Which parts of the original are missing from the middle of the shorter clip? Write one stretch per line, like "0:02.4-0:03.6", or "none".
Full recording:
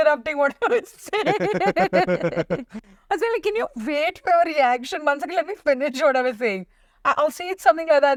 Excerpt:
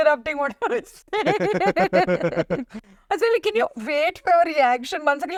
none